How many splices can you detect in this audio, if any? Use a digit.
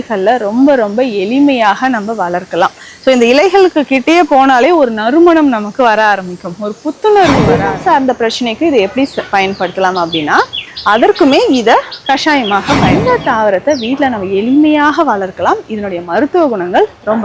2